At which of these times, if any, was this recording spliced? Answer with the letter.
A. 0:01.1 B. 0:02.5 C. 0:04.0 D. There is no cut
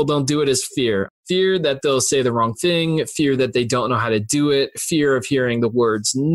A